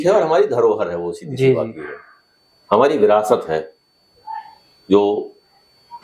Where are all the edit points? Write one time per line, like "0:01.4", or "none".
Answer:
none